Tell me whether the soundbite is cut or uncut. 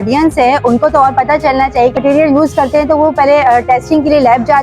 cut